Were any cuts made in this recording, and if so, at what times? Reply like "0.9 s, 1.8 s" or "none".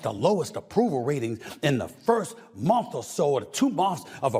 none

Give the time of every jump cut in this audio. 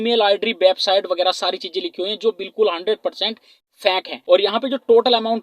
4.1 s

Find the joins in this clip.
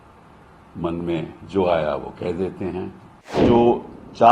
3.4 s

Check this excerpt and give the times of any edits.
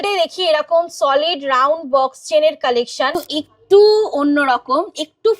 3.2 s

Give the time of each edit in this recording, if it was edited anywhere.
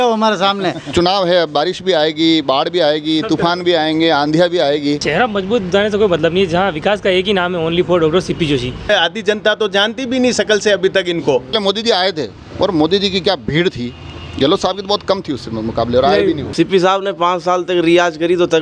0.9 s, 5.0 s, 8.9 s, 11.5 s, 16.5 s

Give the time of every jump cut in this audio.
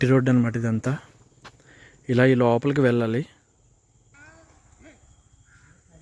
4.1 s

